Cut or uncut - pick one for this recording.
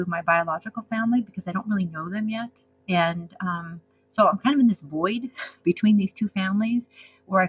uncut